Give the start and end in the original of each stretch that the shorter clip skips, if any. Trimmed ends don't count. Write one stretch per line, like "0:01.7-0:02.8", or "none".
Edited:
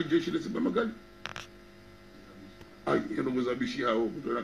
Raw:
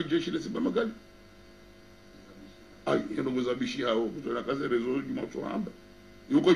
none